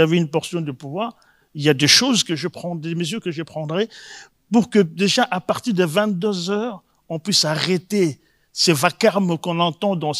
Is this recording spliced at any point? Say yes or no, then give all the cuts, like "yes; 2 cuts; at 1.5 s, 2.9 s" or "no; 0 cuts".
no; 0 cuts